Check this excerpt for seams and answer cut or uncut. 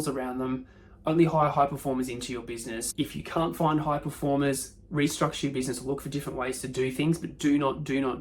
cut